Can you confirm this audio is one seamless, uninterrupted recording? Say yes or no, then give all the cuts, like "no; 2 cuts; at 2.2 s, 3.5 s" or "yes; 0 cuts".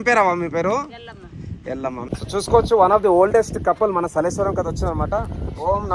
no; 1 cut; at 2.1 s